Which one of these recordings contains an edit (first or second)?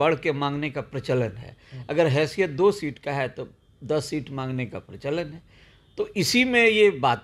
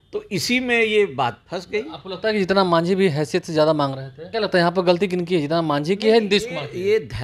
second